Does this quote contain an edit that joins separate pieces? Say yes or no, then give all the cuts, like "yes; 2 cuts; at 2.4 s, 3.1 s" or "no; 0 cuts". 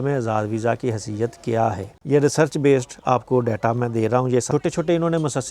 yes; 2 cuts; at 1.9 s, 4.5 s